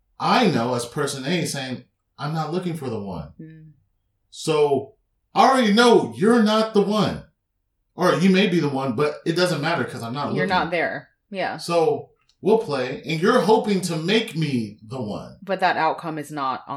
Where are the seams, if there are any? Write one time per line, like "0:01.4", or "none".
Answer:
none

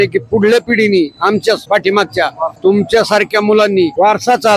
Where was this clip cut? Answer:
none

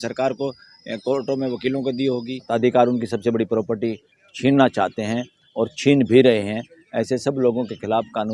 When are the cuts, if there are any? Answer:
0:02.4

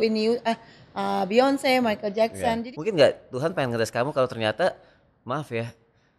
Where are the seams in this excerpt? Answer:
0:02.6

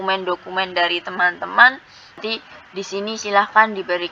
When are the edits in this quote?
0:02.2

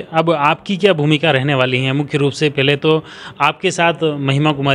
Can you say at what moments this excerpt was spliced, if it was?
none

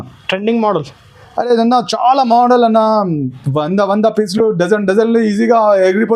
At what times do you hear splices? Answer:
none

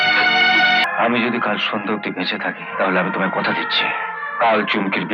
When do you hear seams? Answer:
0:00.8
0:02.6
0:04.2

